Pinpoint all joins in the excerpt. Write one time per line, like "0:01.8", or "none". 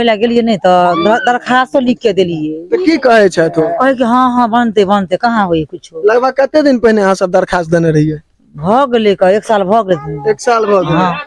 none